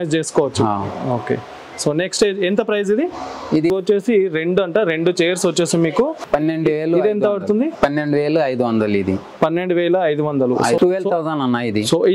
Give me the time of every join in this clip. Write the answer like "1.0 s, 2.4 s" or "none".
3.7 s, 6.2 s, 10.8 s

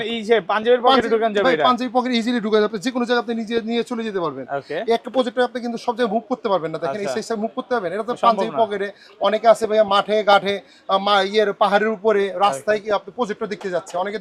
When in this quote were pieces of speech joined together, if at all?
none

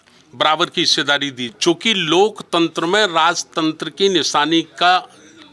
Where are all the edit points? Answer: 1.4 s

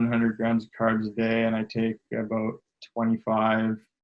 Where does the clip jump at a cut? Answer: none

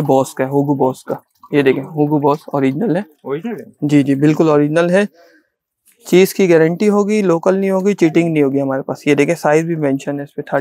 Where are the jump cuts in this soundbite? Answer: none

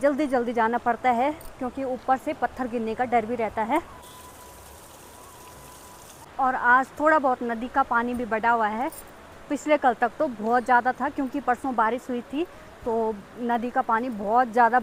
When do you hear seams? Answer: none

